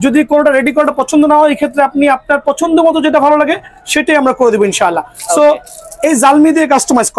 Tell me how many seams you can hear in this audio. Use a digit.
0